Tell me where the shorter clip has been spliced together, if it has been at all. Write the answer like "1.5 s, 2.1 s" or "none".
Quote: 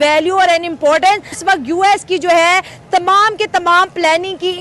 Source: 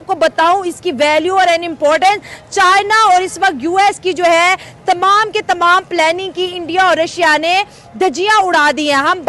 1.4 s